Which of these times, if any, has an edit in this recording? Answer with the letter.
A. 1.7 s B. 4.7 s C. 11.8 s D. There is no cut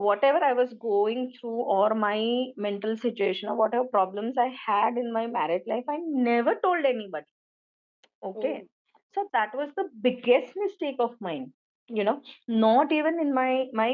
D